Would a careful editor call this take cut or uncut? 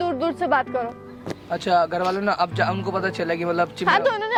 uncut